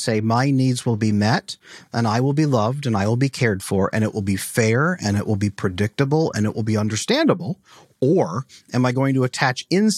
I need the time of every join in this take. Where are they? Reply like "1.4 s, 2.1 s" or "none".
none